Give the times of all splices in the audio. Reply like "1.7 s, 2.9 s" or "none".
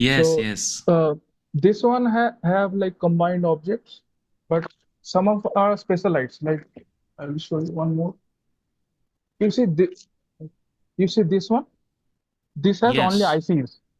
none